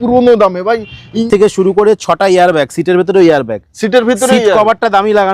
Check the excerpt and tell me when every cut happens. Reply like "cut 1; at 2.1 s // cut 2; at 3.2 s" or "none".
cut 1; at 1.2 s